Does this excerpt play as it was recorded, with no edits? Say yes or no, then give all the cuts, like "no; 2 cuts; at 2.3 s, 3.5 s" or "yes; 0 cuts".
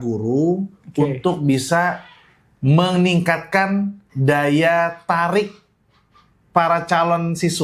yes; 0 cuts